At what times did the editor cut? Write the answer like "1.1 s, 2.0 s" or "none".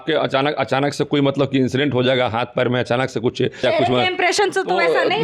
3.6 s